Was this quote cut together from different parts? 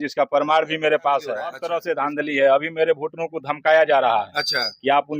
yes; 1 cut; at 1.7 s

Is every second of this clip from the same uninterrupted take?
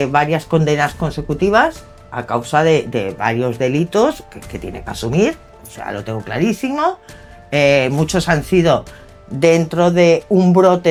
yes; 0 cuts

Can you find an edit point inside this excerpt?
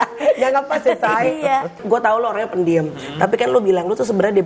yes; 1 cut; at 1.8 s

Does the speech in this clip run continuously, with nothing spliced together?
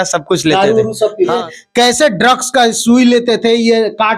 no; 1 cut; at 1.5 s

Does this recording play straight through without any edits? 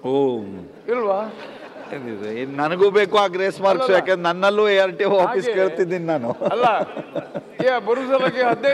yes; 0 cuts

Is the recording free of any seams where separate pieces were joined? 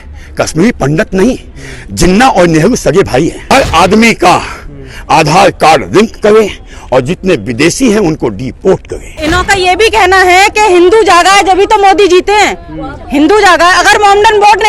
no; 2 cuts; at 3.4 s, 9.1 s

